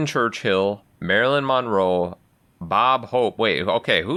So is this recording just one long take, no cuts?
yes; 0 cuts

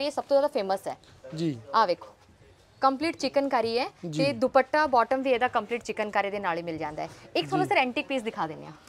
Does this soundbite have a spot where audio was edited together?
no; 0 cuts

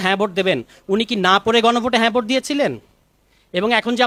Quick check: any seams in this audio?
no; 0 cuts

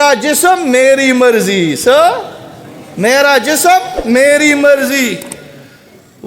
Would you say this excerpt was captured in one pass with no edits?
yes; 0 cuts

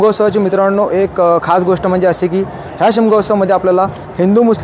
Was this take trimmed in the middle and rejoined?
no; 0 cuts

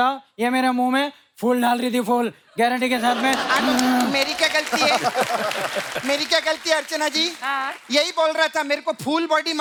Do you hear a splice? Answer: no; 0 cuts

